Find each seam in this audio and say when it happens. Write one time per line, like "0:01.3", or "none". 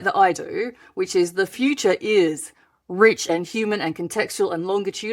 0:03.2